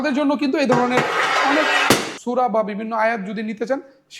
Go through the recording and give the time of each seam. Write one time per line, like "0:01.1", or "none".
0:02.1